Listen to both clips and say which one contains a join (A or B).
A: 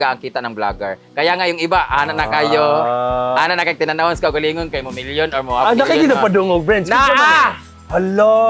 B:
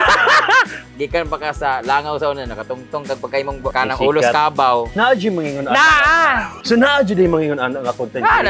B